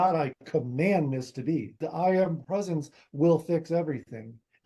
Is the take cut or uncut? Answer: cut